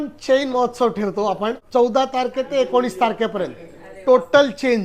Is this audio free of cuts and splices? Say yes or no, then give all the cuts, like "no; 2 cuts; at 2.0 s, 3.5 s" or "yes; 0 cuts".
no; 1 cut; at 1.6 s